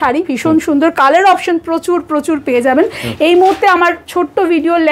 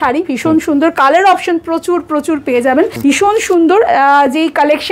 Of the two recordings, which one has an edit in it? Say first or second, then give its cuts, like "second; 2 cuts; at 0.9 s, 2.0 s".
second; 1 cut; at 2.9 s